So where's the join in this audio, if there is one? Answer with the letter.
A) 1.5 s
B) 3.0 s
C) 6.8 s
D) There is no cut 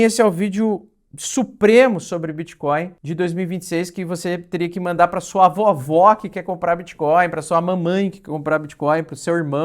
B